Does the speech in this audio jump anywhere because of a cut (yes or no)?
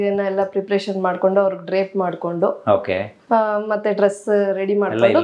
no